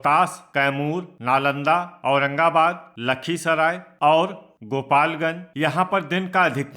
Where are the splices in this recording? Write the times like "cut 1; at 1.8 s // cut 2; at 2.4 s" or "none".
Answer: cut 1; at 0.9 s // cut 2; at 3.9 s // cut 3; at 5.5 s